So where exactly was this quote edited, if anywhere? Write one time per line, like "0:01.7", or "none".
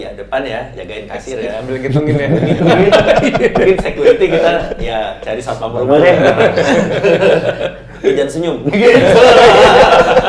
none